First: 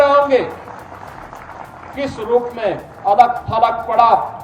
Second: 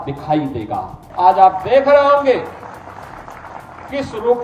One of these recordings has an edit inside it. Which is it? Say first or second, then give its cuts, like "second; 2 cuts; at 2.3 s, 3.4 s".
second; 1 cut; at 1.0 s